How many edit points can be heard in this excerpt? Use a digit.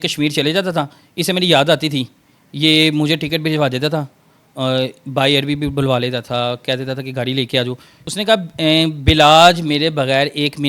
1